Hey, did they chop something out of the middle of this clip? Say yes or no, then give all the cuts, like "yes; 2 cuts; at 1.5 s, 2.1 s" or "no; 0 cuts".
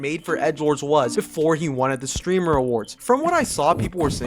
yes; 1 cut; at 2.6 s